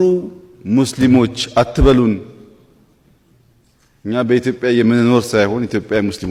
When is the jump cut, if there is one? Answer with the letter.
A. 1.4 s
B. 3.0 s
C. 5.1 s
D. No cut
D